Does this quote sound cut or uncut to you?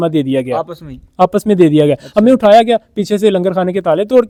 uncut